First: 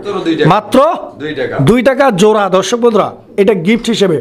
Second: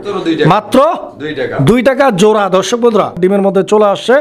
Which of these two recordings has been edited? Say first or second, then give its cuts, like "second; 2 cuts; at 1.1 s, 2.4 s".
second; 1 cut; at 3.2 s